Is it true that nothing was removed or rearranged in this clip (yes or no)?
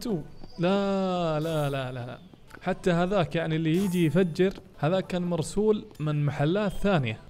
yes